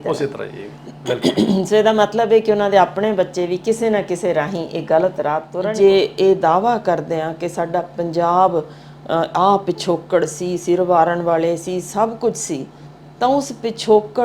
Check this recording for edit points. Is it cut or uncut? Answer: cut